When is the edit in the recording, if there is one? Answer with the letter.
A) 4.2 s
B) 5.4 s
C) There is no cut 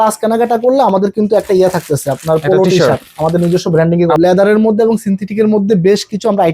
A